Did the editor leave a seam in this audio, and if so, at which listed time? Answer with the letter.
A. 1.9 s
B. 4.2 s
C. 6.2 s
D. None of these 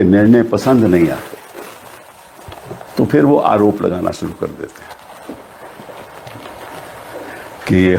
D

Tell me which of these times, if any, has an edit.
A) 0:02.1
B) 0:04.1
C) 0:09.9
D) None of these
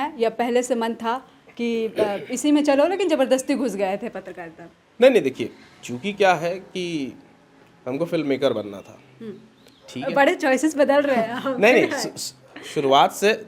D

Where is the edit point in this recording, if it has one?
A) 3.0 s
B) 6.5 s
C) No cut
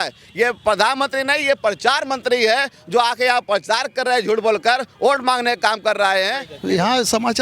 B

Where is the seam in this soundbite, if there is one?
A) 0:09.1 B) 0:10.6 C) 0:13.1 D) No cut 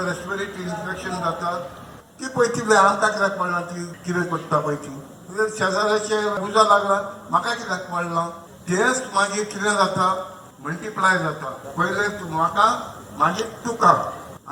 D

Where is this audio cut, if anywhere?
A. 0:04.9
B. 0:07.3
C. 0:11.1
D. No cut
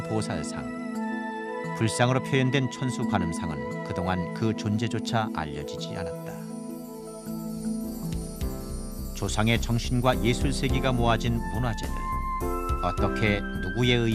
C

